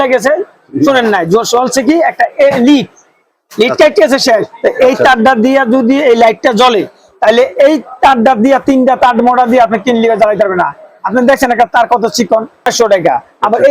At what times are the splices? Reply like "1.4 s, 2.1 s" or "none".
12.7 s